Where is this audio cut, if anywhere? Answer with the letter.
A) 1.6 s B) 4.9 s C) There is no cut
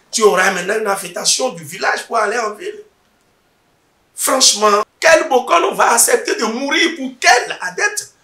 B